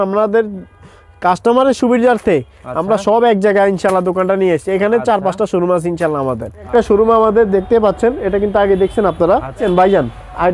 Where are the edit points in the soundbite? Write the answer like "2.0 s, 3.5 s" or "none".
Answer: 6.7 s, 9.6 s